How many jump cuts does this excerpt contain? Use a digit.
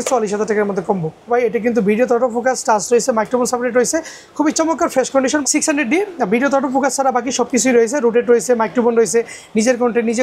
2